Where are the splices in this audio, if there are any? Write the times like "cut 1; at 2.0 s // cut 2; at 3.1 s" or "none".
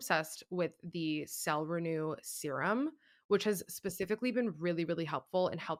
none